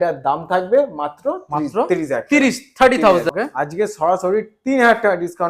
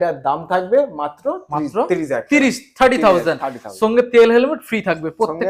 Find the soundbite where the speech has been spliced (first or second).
first